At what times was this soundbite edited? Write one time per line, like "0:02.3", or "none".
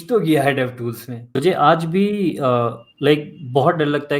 0:01.4